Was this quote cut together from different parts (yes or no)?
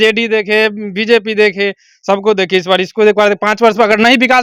no